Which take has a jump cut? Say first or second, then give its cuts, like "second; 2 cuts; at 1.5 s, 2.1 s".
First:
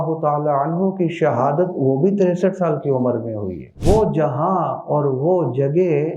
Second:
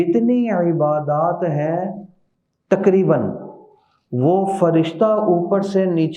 first; 1 cut; at 3.8 s